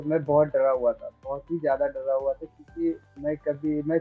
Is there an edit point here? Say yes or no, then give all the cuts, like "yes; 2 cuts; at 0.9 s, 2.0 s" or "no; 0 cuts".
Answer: no; 0 cuts